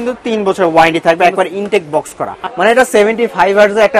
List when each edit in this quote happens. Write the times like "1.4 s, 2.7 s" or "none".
2.4 s